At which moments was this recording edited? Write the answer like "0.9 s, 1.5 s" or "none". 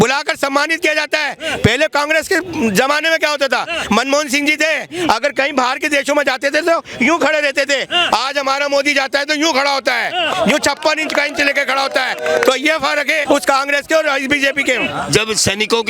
13.2 s, 14.9 s